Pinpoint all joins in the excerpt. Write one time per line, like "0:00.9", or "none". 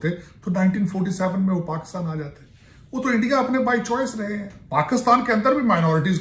none